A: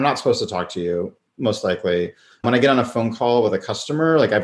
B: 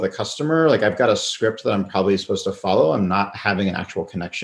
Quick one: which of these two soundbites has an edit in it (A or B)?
A